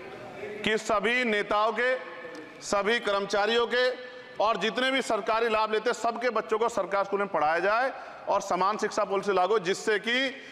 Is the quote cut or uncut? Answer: uncut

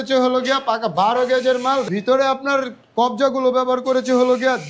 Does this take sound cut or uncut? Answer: cut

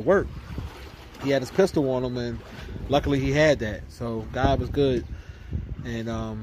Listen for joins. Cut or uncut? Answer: uncut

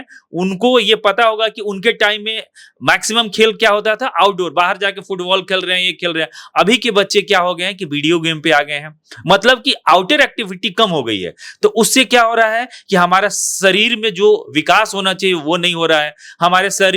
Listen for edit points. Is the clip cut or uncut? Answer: uncut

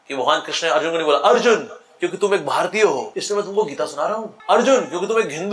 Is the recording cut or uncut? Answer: cut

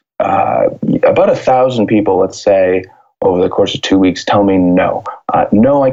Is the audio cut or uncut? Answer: uncut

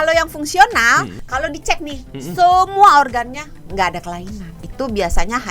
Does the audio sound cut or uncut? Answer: cut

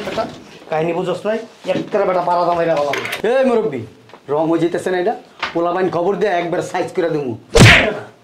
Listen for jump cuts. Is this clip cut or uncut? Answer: uncut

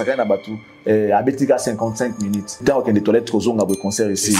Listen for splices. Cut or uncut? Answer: cut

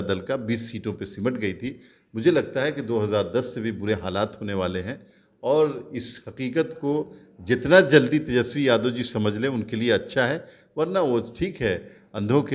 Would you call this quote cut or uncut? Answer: uncut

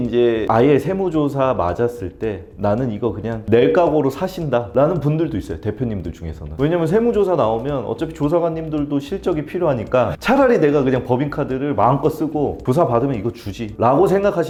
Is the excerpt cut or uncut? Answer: uncut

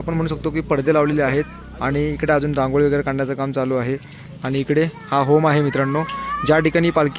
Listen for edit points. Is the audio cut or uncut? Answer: uncut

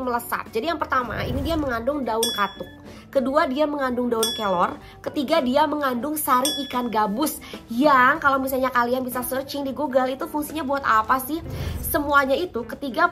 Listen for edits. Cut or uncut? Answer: uncut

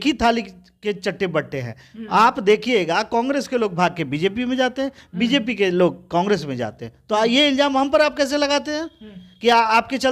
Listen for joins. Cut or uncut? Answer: uncut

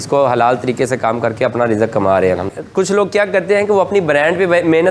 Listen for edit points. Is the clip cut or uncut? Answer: cut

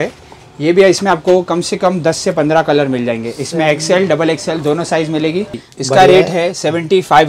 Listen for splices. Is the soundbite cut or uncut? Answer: cut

